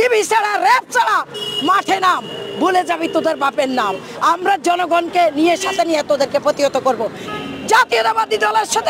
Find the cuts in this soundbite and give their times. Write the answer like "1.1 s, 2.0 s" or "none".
7.2 s